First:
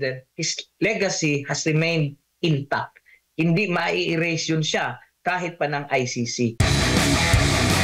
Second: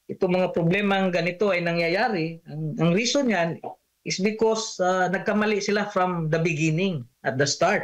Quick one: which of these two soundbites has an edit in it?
first; 1 cut; at 6.5 s

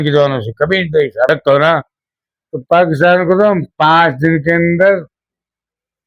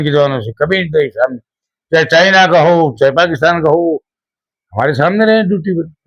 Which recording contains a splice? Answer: first; 1 cut; at 1.3 s

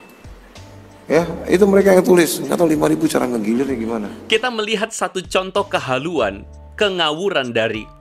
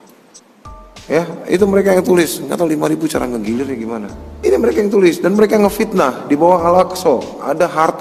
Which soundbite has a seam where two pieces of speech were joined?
second; 1 cut; at 4.2 s

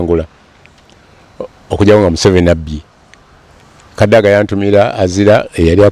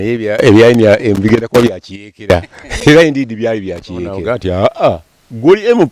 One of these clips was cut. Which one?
second; 1 cut; at 4.2 s

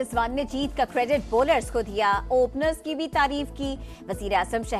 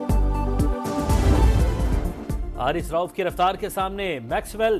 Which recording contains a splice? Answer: second; 1 cut; at 1.8 s

